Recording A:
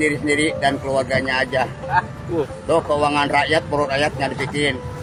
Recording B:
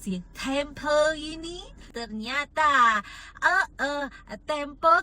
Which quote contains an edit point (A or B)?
B